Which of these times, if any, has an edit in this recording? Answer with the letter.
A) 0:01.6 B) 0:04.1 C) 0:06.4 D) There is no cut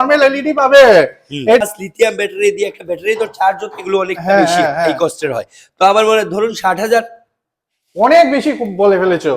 A